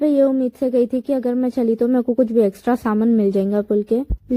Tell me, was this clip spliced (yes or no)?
no